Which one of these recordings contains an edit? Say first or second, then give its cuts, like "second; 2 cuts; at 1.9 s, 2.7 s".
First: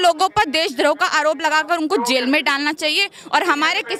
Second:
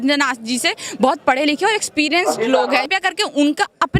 second; 1 cut; at 2.9 s